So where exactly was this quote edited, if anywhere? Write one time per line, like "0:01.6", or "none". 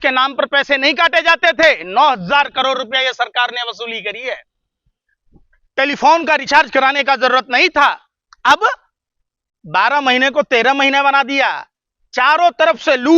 none